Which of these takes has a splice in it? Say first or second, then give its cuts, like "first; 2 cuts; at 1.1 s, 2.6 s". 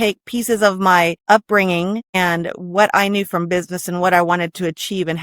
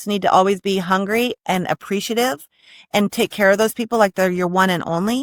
first; 2 cuts; at 1.2 s, 2.1 s